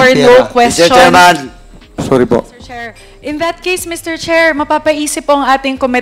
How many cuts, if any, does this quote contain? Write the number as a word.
one